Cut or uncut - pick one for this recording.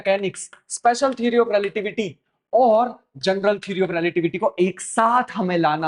uncut